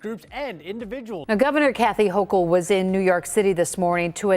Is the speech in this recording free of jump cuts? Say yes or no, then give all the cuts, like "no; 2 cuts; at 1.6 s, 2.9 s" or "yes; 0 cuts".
no; 1 cut; at 1.2 s